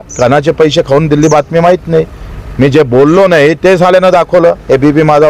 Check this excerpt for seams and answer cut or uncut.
uncut